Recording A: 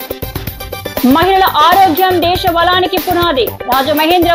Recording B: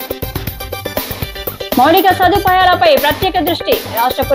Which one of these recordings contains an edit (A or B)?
B